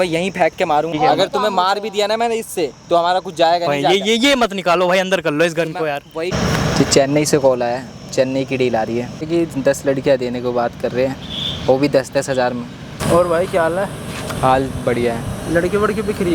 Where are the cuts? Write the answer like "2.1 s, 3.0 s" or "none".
0.9 s, 6.3 s, 9.3 s, 13.0 s